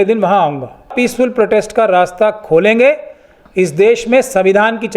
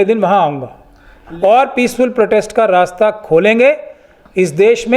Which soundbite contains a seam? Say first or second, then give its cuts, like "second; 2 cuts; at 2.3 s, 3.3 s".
first; 1 cut; at 0.9 s